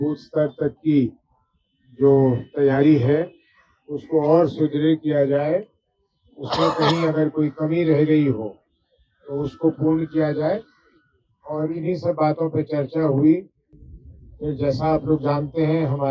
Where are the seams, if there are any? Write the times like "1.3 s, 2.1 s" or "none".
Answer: none